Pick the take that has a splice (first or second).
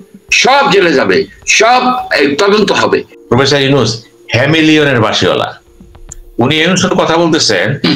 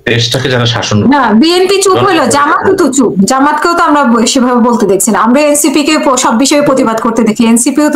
first